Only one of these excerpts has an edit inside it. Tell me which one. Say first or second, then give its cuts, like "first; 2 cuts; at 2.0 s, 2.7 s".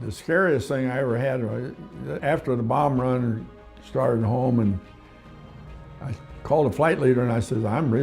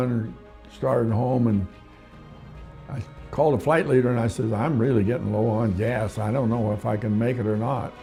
first; 1 cut; at 2.1 s